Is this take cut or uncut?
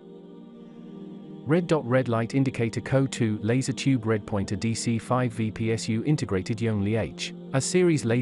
cut